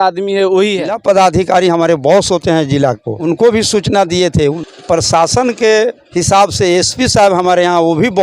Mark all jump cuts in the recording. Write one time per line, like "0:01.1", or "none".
0:00.9
0:03.1
0:04.6